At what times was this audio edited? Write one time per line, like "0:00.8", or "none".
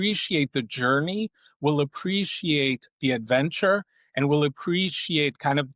none

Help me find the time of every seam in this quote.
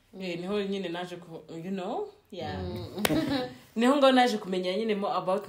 none

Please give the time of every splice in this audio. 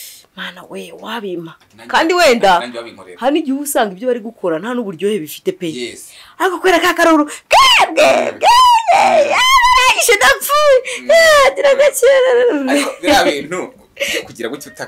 none

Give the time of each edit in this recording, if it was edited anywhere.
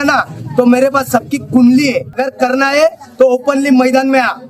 0:02.2

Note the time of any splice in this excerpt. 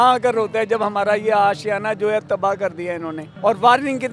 none

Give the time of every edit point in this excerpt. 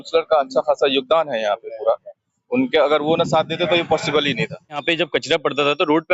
0:04.8

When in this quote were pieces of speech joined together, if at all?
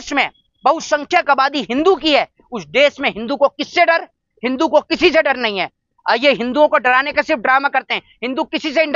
none

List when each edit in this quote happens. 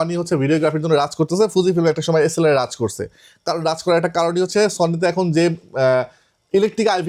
none

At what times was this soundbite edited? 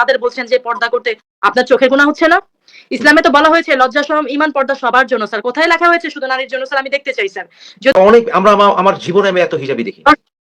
0:07.9

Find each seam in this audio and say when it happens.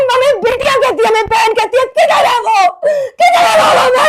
none

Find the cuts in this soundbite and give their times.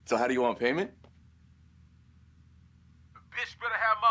0:01.0
0:03.0

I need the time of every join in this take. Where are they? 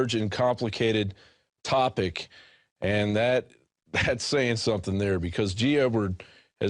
0:02.8

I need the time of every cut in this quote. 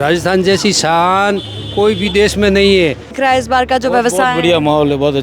0:03.1

